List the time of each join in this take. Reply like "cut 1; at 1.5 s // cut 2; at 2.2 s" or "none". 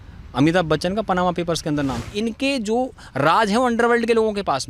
cut 1; at 2.1 s